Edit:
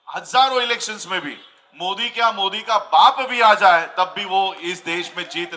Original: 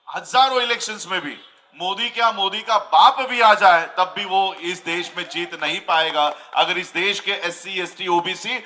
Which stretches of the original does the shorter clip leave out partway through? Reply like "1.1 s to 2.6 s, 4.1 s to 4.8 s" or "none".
none